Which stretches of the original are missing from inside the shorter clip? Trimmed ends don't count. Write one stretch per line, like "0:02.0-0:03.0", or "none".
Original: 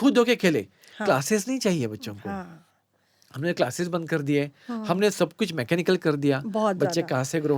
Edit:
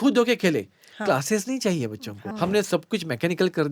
0:02.3-0:04.8